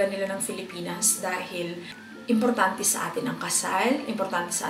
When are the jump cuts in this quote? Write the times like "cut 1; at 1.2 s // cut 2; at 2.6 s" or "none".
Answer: cut 1; at 2.0 s